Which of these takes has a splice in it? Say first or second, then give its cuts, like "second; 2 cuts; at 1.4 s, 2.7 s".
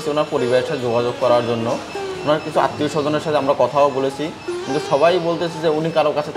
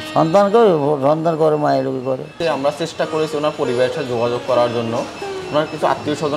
second; 1 cut; at 2.3 s